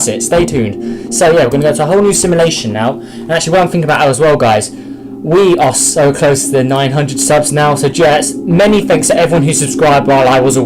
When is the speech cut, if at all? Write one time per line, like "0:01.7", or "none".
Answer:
0:06.8